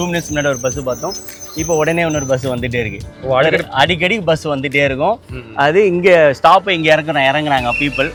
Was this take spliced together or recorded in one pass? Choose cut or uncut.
uncut